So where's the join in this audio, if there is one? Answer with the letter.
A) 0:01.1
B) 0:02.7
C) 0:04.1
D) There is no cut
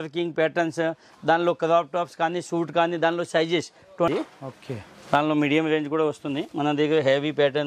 C